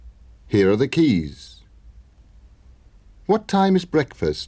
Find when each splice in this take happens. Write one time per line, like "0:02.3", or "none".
0:01.9